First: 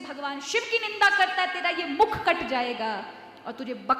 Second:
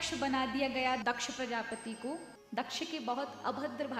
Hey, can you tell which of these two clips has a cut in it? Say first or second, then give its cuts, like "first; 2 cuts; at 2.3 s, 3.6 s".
second; 2 cuts; at 1.0 s, 2.4 s